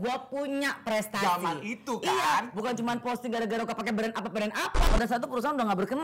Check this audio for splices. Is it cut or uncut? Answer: cut